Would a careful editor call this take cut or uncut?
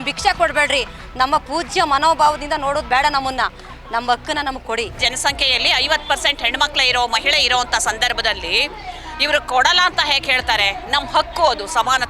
cut